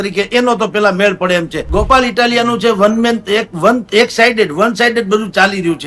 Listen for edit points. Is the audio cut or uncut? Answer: cut